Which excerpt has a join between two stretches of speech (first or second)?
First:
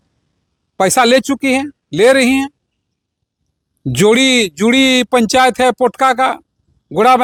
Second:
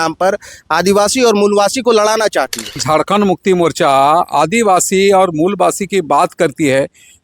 second